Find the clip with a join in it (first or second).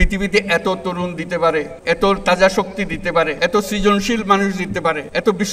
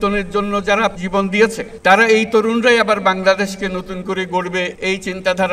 second